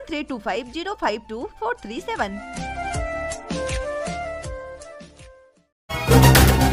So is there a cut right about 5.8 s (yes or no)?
yes